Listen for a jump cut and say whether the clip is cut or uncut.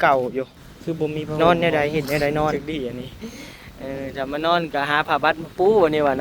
cut